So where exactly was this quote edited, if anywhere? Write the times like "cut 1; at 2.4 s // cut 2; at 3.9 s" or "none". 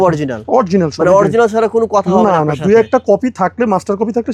none